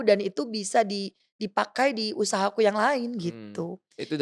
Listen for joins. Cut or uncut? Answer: uncut